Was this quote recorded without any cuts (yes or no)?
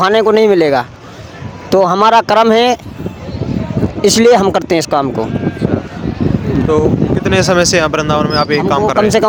yes